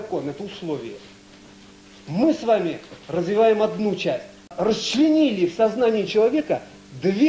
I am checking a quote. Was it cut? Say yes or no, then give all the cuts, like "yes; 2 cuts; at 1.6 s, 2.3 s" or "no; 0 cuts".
yes; 1 cut; at 4.5 s